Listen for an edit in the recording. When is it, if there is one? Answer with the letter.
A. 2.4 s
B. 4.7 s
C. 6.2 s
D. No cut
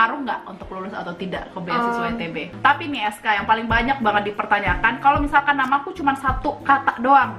A